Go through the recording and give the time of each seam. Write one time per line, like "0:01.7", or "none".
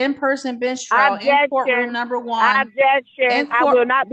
none